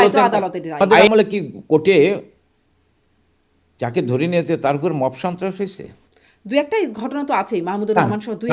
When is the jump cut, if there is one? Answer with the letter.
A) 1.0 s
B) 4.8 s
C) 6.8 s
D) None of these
A